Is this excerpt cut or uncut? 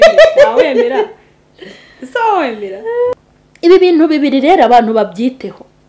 cut